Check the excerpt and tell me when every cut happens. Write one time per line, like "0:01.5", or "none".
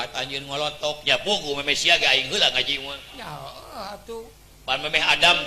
0:04.4